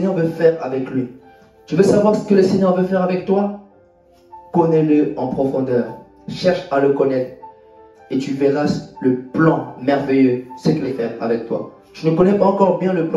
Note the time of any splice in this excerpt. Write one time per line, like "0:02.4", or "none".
0:10.9